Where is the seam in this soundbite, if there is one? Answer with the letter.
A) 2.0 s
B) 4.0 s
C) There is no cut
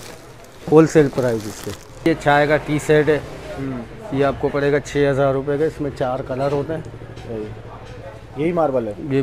A